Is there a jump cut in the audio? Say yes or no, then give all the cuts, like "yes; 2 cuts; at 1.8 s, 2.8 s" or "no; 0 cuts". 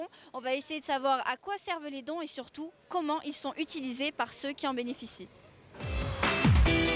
yes; 1 cut; at 1.5 s